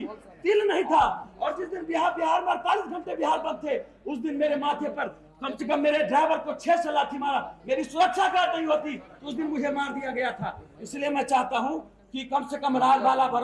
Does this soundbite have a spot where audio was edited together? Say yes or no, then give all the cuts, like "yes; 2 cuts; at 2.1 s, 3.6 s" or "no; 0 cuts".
no; 0 cuts